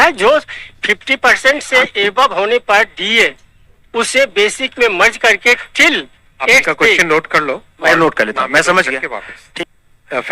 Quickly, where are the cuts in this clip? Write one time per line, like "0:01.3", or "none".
0:09.4